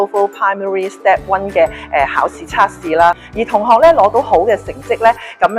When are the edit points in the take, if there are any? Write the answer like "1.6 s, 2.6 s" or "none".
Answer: 3.3 s